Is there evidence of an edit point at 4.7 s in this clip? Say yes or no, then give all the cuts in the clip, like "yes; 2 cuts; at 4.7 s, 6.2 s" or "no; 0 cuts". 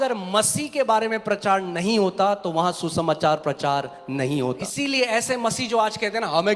yes; 1 cut; at 4.7 s